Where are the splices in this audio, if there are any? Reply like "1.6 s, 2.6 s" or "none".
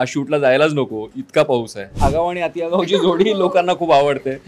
2.0 s